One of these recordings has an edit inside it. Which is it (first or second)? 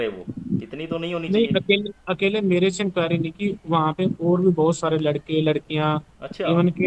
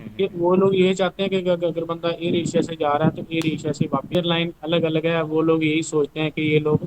second